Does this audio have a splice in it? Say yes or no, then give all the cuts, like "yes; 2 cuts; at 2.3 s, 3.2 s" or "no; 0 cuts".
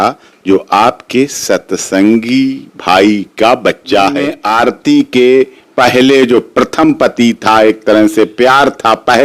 yes; 1 cut; at 4.4 s